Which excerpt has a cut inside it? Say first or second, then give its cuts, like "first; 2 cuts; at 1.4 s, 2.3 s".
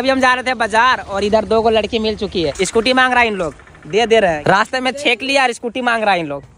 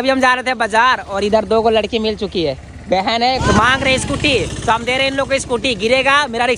first; 2 cuts; at 2.6 s, 4.4 s